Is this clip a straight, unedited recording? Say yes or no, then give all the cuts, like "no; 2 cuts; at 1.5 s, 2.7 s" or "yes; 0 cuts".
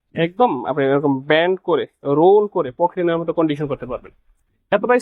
yes; 0 cuts